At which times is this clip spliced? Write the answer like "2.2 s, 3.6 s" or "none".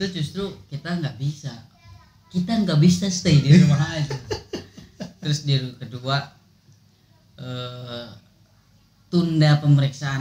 none